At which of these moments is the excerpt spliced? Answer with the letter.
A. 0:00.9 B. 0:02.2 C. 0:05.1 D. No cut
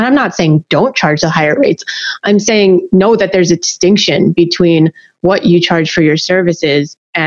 D